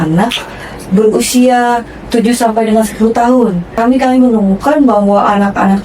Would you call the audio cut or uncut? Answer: cut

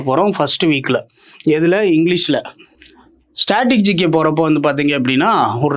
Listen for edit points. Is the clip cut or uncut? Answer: uncut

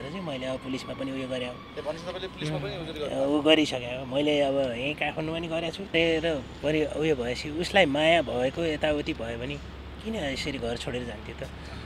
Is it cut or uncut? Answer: cut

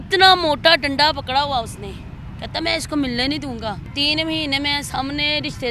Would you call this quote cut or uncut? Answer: uncut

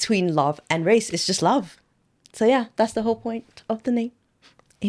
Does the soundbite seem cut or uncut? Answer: uncut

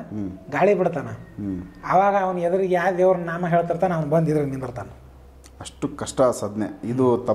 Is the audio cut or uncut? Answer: uncut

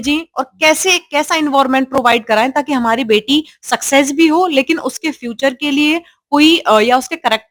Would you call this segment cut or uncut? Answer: uncut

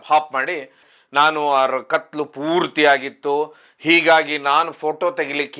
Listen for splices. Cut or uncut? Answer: cut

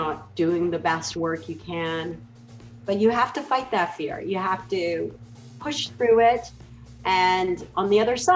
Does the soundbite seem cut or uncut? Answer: uncut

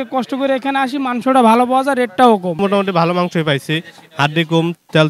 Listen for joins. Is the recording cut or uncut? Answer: cut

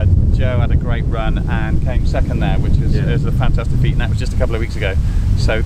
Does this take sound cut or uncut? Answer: uncut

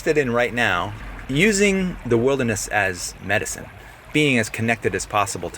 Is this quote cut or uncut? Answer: cut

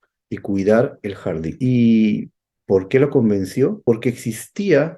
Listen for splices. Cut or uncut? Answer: cut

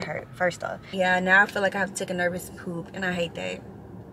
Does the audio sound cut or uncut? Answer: cut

